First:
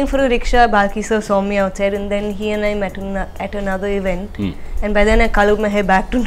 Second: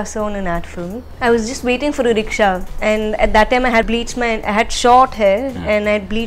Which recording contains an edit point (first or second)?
second